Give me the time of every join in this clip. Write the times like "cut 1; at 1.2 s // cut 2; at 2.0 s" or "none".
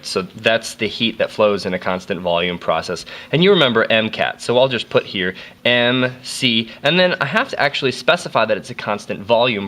cut 1; at 7.7 s